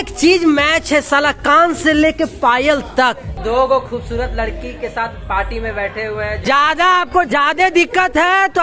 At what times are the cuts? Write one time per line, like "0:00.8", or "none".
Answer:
0:03.4
0:06.4